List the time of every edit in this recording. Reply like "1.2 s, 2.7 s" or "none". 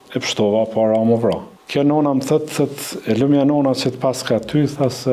1.5 s